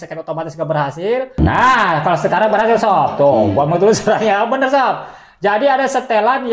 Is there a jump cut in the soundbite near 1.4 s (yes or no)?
yes